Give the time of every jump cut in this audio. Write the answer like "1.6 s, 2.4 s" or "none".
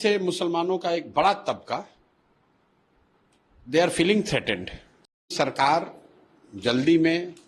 5.3 s